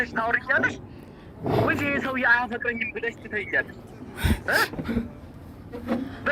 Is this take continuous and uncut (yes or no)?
yes